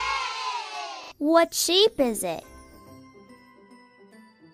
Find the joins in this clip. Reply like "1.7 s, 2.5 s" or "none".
1.1 s